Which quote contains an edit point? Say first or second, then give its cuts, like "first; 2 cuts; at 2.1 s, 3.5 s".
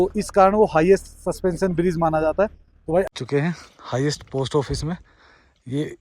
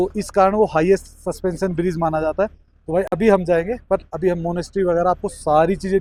first; 1 cut; at 3.1 s